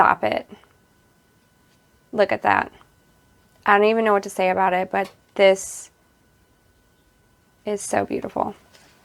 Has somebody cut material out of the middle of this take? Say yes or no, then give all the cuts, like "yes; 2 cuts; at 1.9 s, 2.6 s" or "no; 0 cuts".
no; 0 cuts